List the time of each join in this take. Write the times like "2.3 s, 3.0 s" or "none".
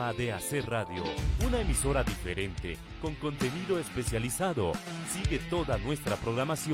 none